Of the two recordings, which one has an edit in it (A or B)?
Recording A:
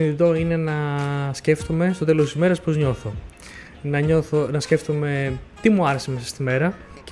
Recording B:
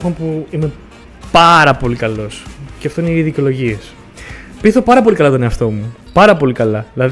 A